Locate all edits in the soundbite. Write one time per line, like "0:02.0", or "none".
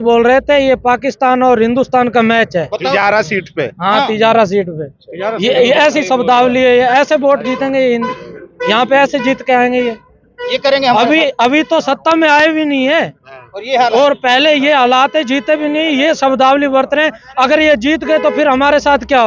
none

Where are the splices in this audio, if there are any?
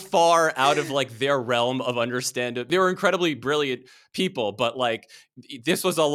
0:02.7

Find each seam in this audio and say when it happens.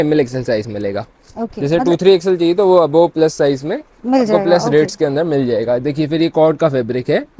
none

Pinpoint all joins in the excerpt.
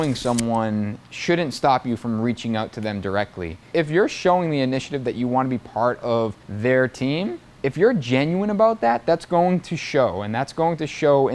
0:03.6
0:06.4
0:07.4

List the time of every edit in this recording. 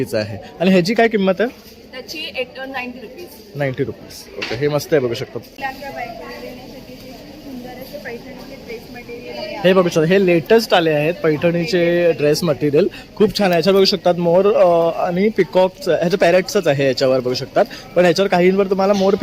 0:05.6

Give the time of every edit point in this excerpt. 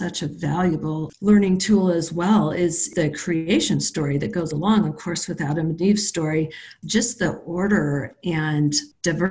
0:01.1

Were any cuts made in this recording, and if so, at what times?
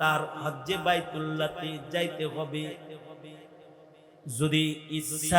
none

